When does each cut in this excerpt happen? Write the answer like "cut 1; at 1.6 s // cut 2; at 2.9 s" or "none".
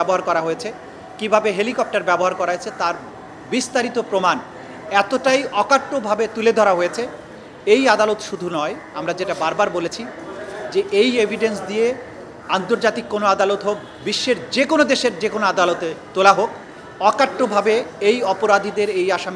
none